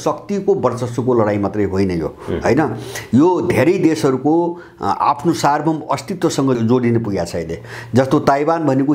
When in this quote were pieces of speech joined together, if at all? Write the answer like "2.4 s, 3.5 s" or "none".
6.6 s